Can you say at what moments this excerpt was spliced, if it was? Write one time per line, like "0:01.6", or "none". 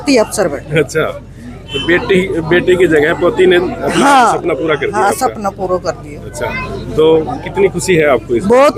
none